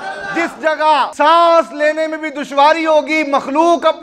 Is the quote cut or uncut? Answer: cut